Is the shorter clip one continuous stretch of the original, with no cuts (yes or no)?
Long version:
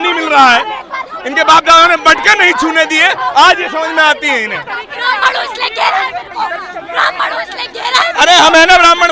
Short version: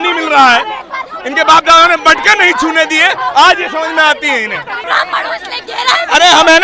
no